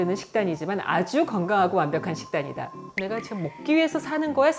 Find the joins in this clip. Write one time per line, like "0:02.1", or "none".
0:02.9